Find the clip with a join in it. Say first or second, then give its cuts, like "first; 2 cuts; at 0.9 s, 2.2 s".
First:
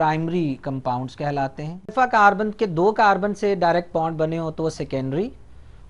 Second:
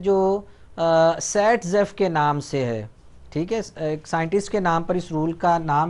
first; 1 cut; at 1.9 s